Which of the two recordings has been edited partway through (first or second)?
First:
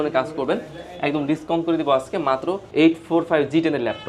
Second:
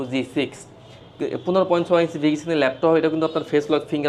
first